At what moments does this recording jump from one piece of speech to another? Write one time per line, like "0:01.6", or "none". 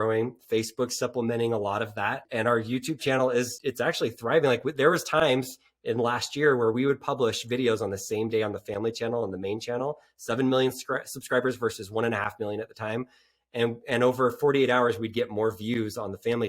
0:02.2
0:03.5